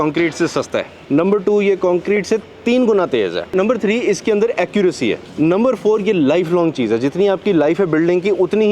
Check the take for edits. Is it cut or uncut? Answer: cut